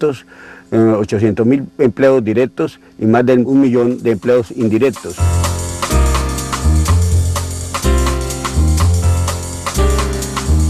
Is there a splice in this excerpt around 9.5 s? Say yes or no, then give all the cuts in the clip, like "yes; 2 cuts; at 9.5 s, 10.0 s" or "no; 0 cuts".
no; 1 cut; at 6.7 s